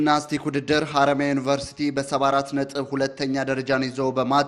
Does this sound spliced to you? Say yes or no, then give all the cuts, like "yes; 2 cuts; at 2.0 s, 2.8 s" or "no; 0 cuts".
no; 0 cuts